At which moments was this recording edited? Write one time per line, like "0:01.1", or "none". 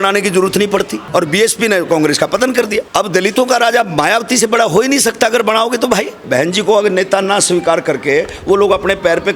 0:01.0
0:02.9
0:06.2